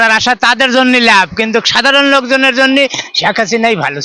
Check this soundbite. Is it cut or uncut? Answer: uncut